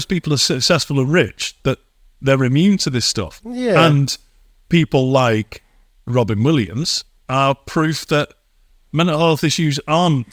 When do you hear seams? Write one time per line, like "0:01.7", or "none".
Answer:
none